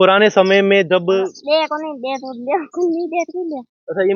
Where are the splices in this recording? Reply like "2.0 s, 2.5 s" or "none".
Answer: 1.3 s